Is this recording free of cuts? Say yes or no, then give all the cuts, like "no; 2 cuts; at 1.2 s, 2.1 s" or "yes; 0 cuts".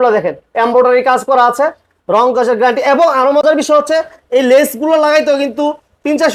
yes; 0 cuts